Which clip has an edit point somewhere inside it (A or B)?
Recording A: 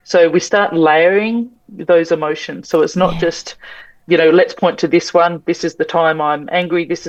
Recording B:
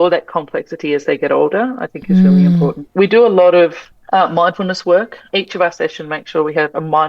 B